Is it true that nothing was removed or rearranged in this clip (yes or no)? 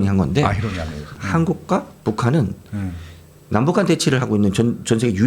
no